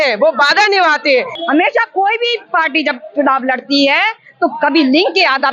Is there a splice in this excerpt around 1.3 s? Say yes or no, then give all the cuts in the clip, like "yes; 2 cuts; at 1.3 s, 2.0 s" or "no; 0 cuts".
yes; 1 cut; at 1.3 s